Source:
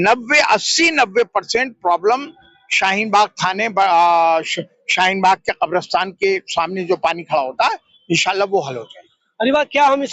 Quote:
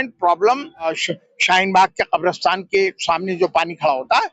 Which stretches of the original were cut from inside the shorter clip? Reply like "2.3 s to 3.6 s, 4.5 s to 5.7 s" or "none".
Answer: 2.6 s to 4.5 s